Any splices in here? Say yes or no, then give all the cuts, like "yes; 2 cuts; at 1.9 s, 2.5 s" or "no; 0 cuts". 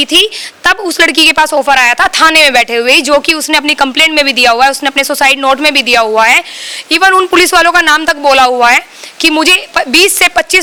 no; 0 cuts